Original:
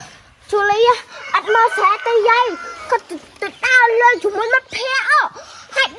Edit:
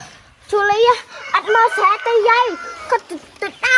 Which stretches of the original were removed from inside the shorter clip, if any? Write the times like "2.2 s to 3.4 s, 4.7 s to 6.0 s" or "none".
none

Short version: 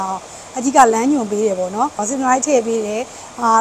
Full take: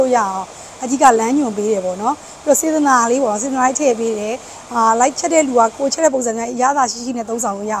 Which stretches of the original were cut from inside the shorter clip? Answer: 2.3 s to 3.4 s

